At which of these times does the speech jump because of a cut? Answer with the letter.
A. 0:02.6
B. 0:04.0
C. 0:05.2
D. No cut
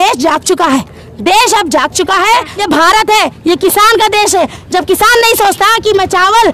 A